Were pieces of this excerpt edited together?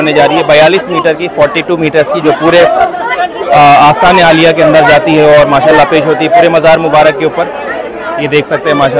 no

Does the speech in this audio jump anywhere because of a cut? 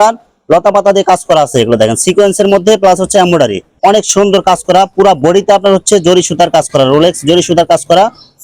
yes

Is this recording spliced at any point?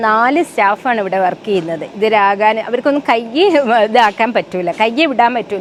no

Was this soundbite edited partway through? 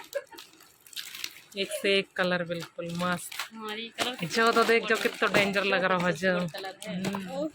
no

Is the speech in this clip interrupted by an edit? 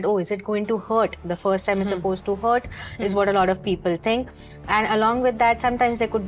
no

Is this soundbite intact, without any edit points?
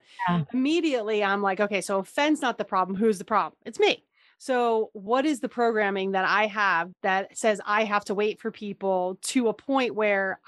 yes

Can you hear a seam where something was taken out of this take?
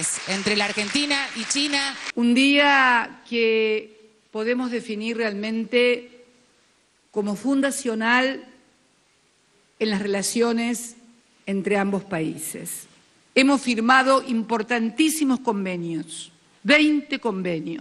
no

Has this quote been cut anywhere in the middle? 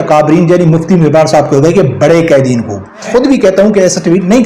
yes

